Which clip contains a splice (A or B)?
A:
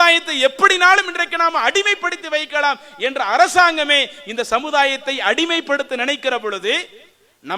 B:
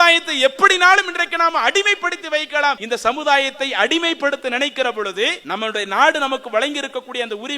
B